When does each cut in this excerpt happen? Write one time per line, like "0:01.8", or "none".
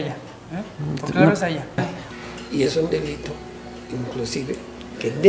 0:02.0